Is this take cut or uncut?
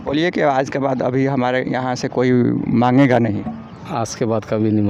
uncut